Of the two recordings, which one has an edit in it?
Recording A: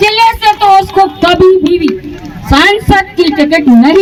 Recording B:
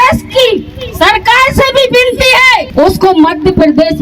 B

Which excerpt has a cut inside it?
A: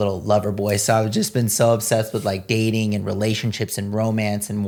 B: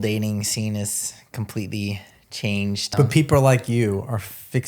B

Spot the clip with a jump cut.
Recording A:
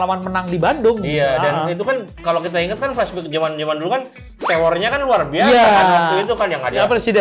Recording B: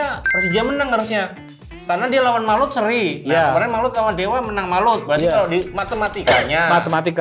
A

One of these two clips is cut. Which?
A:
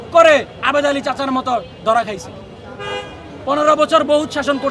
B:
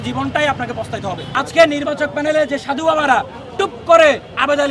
B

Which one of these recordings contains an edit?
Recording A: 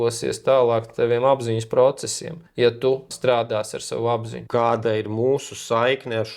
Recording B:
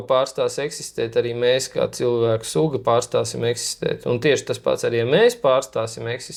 A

